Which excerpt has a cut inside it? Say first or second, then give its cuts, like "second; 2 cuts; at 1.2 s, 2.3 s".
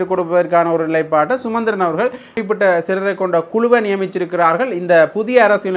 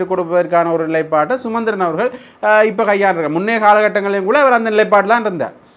first; 1 cut; at 2.3 s